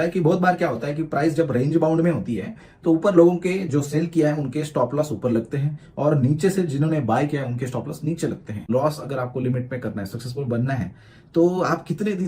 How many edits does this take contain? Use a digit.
1